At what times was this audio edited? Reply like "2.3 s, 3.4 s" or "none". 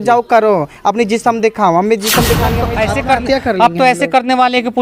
2.6 s